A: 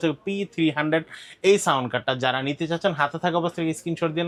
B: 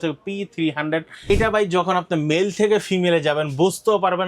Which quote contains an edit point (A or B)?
B